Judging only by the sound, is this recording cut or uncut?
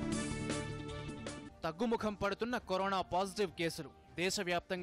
cut